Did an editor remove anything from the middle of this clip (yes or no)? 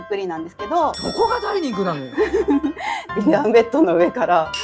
yes